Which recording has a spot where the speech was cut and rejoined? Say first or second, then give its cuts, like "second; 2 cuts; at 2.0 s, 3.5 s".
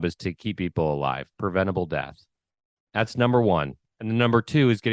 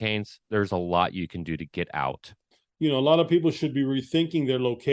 second; 1 cut; at 2.6 s